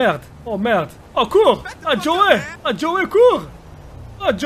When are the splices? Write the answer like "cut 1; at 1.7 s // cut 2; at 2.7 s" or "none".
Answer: cut 1; at 1.0 s // cut 2; at 2.5 s